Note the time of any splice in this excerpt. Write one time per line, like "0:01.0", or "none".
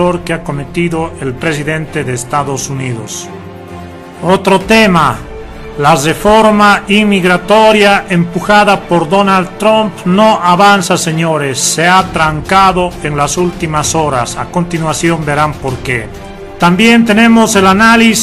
0:08.8